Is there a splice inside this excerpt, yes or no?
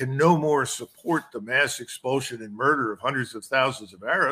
no